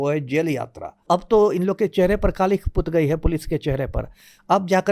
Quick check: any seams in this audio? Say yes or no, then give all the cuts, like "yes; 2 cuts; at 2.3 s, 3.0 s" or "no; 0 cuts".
yes; 1 cut; at 1.0 s